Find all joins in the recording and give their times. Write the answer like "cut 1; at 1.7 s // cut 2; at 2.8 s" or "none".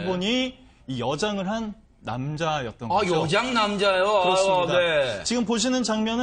none